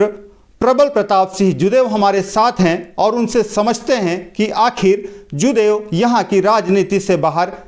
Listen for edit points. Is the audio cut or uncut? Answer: uncut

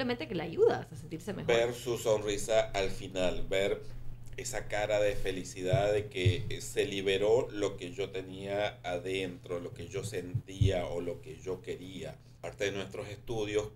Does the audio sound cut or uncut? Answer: cut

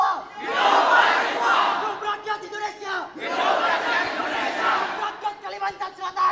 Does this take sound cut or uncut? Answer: uncut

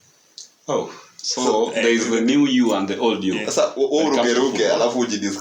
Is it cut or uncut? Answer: uncut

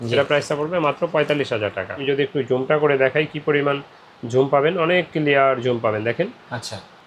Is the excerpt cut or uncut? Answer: cut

